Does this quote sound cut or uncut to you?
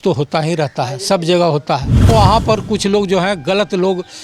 cut